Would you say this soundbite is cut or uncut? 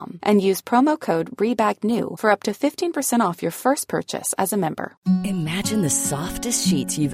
cut